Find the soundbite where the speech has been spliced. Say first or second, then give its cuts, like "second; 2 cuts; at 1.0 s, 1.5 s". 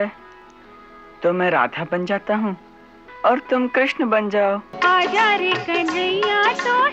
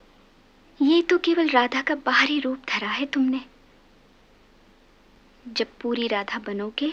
first; 1 cut; at 4.7 s